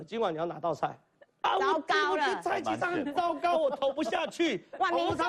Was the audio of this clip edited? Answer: yes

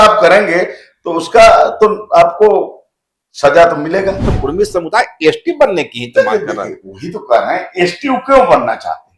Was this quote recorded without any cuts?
no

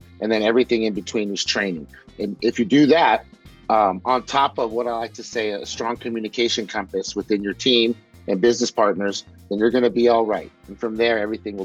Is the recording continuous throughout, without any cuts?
yes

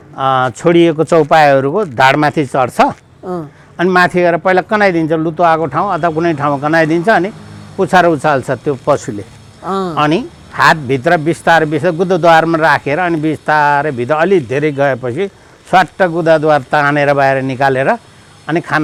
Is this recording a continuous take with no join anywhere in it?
yes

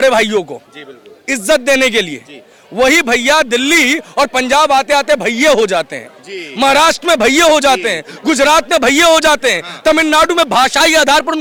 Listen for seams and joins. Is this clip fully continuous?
yes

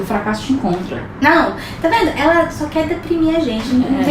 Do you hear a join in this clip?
yes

